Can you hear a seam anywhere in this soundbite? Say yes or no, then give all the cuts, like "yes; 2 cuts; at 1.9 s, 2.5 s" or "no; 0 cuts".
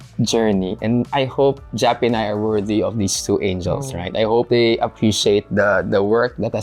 yes; 2 cuts; at 1.1 s, 4.5 s